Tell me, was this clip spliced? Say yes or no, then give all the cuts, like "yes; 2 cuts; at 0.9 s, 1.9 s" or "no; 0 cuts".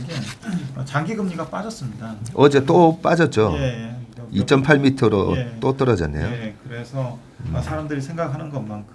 no; 0 cuts